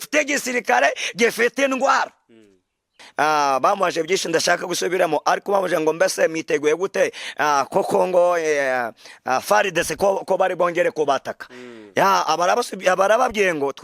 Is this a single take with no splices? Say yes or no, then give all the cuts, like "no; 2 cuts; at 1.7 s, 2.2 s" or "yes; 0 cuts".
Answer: no; 1 cut; at 3.0 s